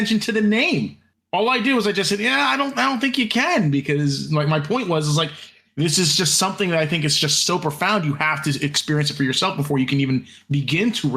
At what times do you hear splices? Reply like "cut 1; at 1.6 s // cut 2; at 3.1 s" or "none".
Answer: none